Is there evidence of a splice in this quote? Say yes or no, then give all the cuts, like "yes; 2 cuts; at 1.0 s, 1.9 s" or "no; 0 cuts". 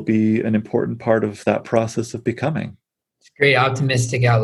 no; 0 cuts